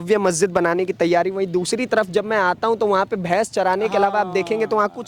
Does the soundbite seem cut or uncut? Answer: uncut